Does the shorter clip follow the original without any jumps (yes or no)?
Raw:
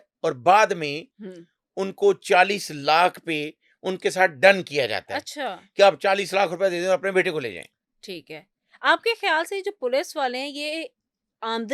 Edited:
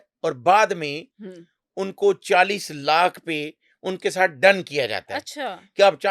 yes